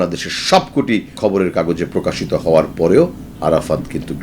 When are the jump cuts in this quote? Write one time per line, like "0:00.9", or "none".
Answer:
0:01.2
0:03.3